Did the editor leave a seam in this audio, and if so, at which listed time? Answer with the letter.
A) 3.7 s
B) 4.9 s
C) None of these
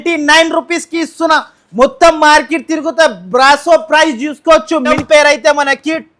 B